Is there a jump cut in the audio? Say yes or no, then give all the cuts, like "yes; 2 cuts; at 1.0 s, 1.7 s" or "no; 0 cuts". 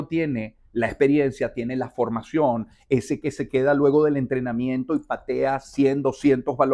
no; 0 cuts